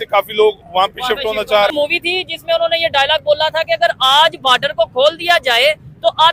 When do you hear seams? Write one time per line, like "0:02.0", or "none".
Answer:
0:01.7